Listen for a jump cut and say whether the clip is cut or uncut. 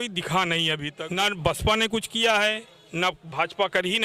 uncut